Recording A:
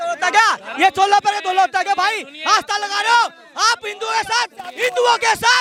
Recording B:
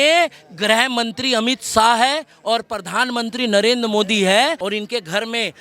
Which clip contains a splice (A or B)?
B